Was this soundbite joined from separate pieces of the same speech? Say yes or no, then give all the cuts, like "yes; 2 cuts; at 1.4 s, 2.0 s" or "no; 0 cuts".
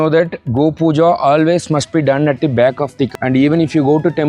yes; 1 cut; at 3.1 s